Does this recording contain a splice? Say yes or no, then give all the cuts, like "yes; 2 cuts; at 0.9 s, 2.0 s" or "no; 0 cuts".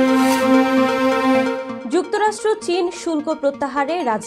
no; 0 cuts